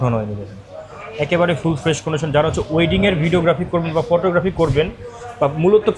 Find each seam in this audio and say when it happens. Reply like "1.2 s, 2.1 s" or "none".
none